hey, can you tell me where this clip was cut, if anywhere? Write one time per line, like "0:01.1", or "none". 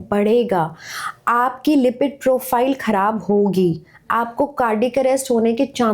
none